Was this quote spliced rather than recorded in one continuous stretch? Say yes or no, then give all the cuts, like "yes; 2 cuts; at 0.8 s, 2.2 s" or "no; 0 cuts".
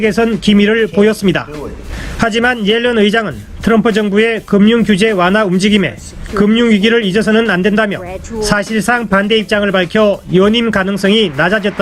yes; 1 cut; at 10.2 s